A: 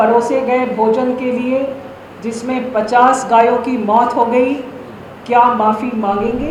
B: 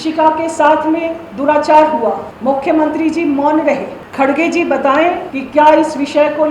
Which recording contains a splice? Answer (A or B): B